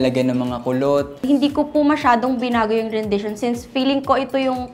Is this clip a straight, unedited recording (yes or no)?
no